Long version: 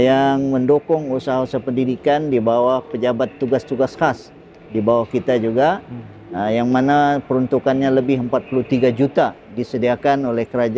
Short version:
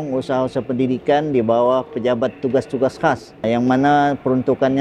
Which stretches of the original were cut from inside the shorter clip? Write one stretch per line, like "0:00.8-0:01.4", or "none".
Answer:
0:04.4-0:06.5